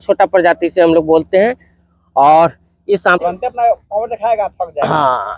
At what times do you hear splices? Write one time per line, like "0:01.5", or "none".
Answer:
0:03.2